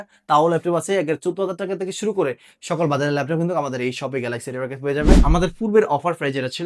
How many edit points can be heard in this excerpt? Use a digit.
1